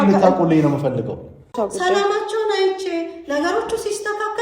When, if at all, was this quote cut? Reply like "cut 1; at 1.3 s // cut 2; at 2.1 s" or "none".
cut 1; at 1.6 s